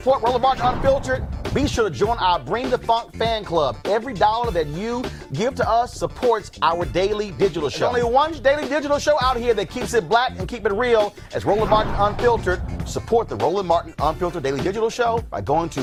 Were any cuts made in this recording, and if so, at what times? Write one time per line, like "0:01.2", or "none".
none